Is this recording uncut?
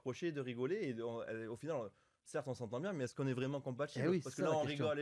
yes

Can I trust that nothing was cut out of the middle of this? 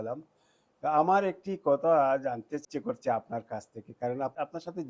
yes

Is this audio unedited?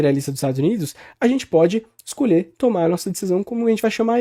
yes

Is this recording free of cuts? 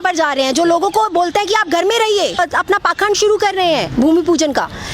no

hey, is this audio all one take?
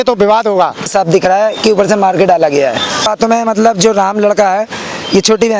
no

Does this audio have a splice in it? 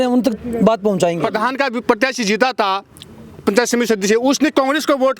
yes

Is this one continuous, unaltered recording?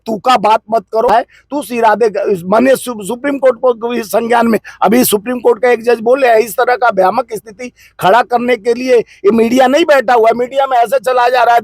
no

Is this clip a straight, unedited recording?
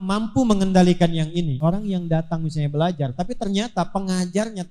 no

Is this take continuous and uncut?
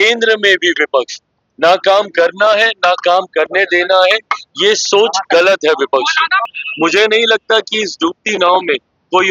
no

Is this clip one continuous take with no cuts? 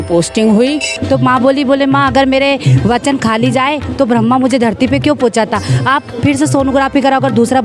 no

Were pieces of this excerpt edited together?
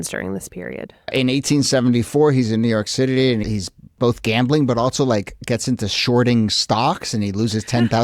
yes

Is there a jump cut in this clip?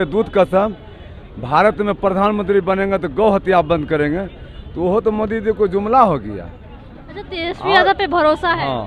no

